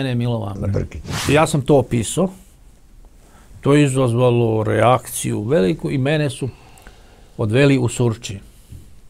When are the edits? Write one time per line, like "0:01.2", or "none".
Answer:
0:01.0